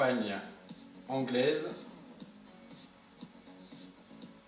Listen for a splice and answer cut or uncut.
uncut